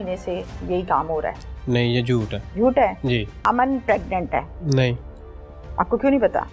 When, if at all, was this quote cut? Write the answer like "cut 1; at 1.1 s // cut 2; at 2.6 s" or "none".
cut 1; at 2.4 s // cut 2; at 3.3 s // cut 3; at 4.6 s